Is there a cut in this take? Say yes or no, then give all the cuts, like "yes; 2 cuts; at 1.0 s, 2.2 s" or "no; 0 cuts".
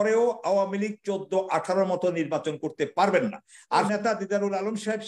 yes; 1 cut; at 3.9 s